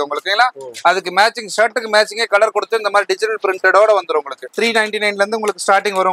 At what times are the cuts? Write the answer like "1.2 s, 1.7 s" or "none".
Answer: 4.4 s